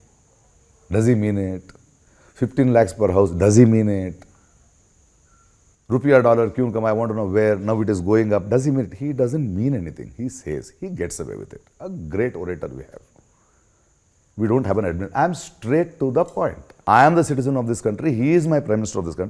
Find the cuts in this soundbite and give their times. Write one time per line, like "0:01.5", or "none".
0:16.7